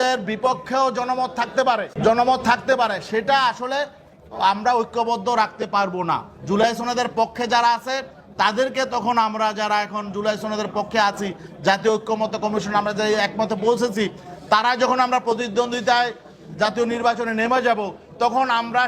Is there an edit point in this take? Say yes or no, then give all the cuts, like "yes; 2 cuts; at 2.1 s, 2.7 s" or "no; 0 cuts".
yes; 1 cut; at 1.9 s